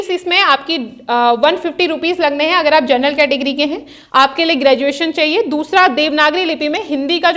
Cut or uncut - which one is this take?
cut